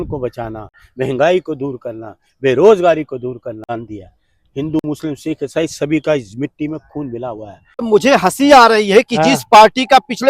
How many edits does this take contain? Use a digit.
2